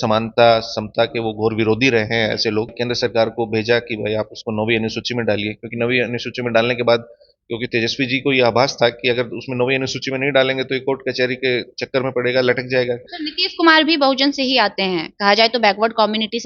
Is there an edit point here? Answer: yes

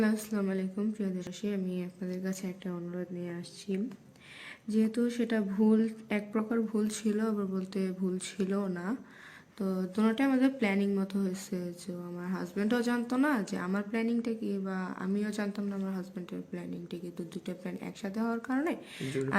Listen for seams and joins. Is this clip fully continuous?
no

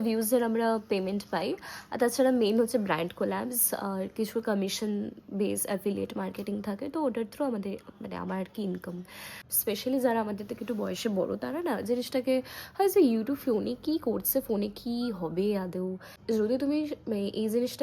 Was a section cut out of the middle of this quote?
yes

